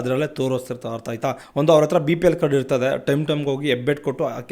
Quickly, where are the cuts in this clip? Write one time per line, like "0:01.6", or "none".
0:01.4